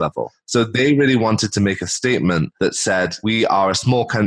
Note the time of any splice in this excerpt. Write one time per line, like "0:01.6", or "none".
0:03.1